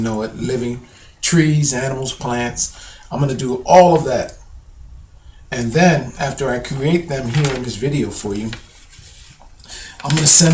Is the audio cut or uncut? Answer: uncut